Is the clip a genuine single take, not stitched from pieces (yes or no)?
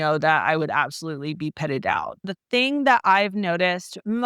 no